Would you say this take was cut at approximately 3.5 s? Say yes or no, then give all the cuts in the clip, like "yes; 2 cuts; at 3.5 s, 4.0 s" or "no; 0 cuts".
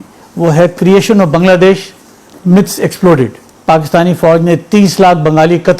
yes; 1 cut; at 3.5 s